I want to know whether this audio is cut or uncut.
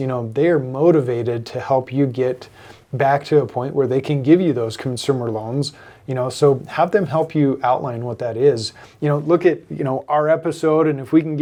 uncut